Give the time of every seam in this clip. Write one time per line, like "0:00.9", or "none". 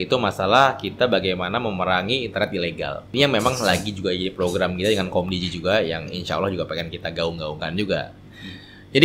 0:03.1